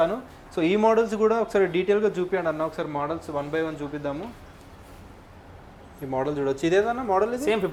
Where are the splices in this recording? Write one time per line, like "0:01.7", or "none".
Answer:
none